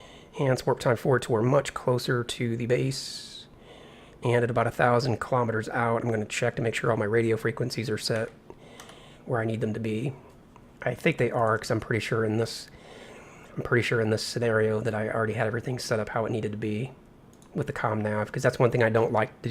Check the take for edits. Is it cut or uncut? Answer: cut